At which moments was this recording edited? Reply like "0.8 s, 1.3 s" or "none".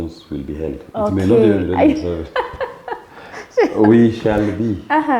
none